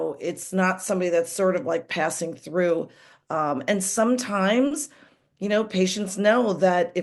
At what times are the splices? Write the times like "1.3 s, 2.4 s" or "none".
none